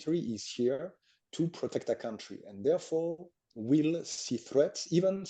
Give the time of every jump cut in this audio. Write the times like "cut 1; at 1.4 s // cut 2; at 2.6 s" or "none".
none

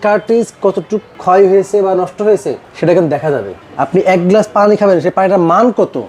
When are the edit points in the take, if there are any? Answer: cut 1; at 1.1 s // cut 2; at 3.6 s

